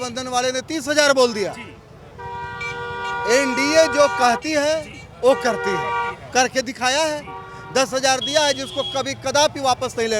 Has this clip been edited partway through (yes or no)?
no